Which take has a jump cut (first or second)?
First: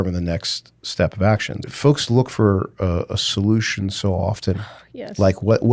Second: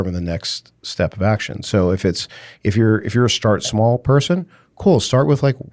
first